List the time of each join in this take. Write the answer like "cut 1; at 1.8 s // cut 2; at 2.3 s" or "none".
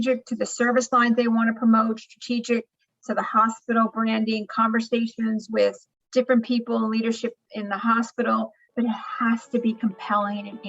cut 1; at 5.9 s // cut 2; at 8.7 s

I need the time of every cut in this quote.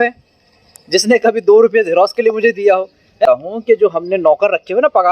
cut 1; at 3.3 s

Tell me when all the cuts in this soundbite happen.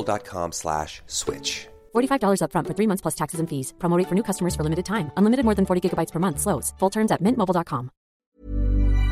cut 1; at 8.1 s

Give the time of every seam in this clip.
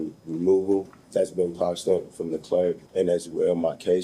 cut 1; at 1.0 s // cut 2; at 2.8 s

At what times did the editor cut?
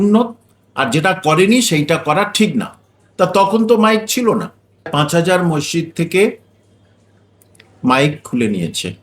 cut 1; at 4.9 s

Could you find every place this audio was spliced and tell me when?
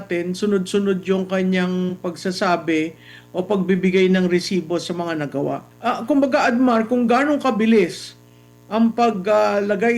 cut 1; at 5.7 s

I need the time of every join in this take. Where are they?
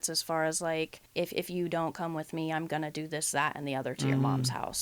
cut 1; at 1.0 s

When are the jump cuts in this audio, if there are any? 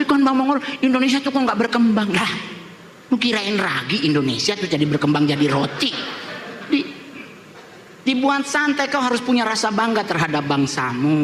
none

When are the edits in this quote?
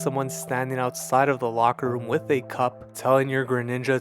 cut 1; at 2.9 s

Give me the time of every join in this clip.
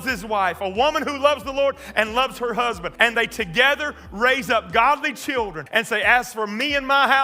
cut 1; at 2.9 s // cut 2; at 5.6 s

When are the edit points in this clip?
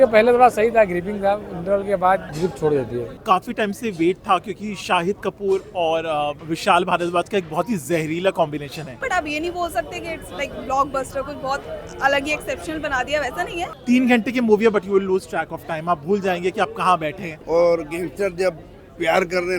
cut 1; at 2.3 s // cut 2; at 3.1 s // cut 3; at 6.5 s // cut 4; at 8.9 s // cut 5; at 13.7 s // cut 6; at 17.3 s

